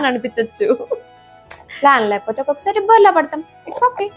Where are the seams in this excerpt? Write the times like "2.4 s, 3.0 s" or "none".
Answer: 1.7 s